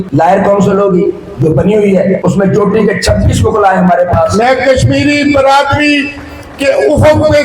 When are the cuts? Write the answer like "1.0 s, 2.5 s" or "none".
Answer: 4.3 s